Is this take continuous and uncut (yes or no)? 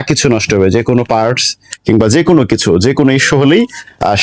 yes